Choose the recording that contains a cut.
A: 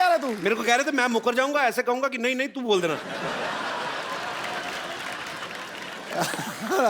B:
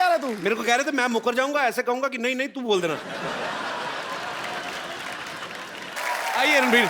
B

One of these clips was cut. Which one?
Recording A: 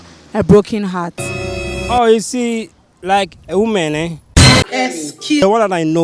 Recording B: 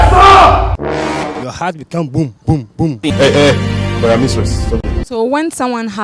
B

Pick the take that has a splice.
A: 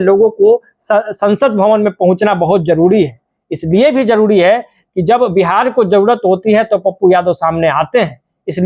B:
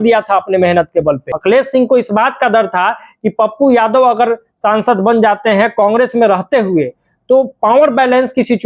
B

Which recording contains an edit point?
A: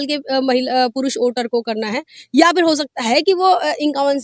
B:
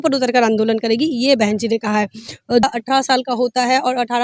B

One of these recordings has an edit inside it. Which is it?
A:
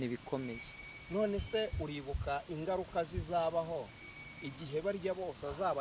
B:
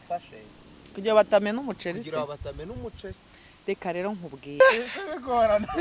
B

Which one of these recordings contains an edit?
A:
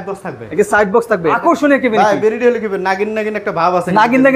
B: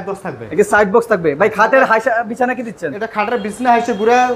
A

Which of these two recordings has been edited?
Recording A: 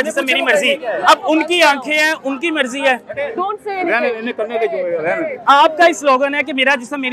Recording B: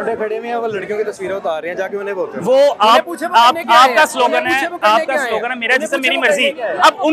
A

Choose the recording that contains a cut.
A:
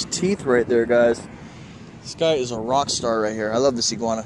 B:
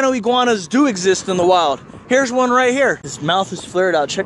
B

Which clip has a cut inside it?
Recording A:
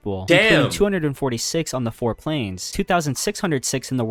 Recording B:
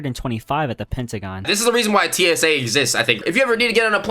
B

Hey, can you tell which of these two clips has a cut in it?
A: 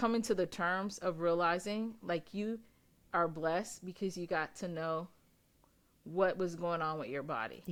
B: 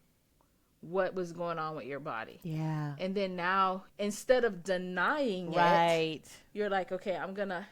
B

